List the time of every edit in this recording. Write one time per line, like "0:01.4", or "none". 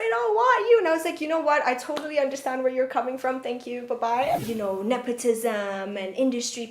0:04.4